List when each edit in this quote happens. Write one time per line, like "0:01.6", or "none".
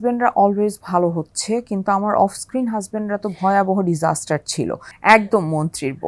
0:04.8